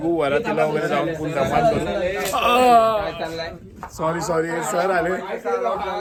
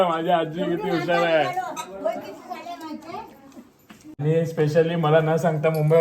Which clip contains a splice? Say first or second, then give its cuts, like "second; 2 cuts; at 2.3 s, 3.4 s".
second; 1 cut; at 4.2 s